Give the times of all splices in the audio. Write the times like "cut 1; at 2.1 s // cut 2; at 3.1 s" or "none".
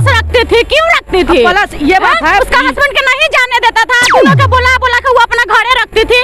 cut 1; at 2.4 s